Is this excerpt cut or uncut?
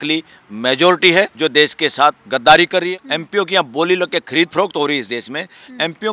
cut